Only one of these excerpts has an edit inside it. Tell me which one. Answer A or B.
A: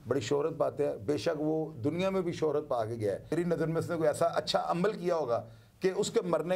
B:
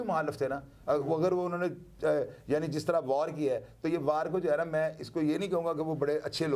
A